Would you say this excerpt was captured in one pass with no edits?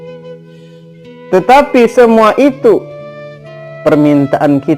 no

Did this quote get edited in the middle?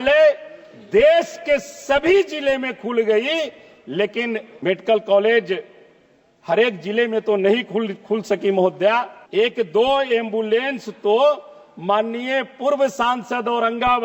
yes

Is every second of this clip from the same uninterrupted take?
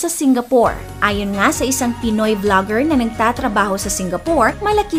yes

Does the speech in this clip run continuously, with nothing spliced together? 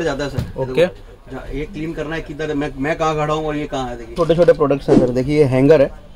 no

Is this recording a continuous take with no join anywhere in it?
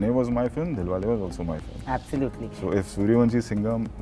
yes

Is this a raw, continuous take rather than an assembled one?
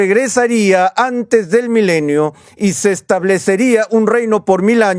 yes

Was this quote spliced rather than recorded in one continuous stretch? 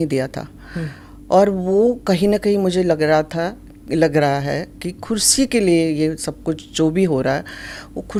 no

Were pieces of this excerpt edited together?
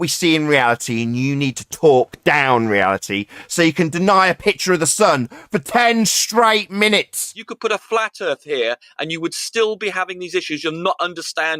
yes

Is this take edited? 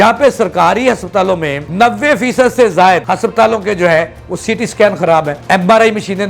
yes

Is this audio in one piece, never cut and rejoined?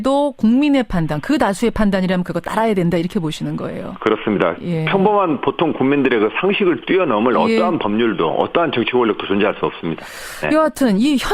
no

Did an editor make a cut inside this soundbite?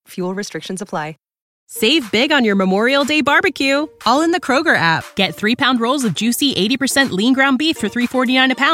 yes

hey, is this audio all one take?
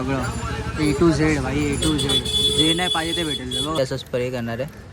no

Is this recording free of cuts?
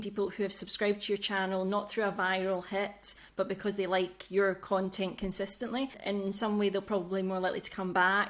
no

